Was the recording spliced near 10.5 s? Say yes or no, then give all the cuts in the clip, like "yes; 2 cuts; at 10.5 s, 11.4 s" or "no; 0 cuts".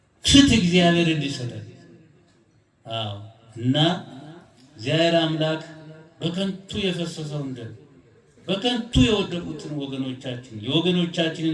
no; 0 cuts